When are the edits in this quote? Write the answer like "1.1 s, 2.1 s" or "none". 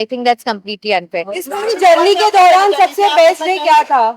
none